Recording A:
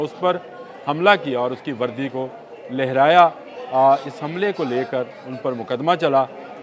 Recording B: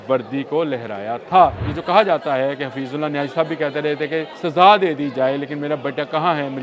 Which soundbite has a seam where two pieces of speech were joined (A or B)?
B